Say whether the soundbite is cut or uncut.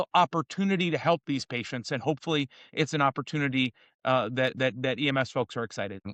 uncut